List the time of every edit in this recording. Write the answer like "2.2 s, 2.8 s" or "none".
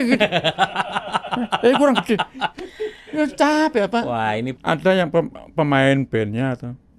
4.5 s